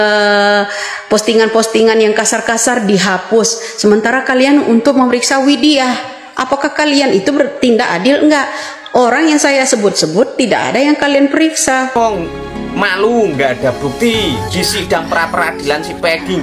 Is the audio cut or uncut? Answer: cut